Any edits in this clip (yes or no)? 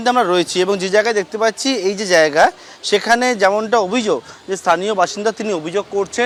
no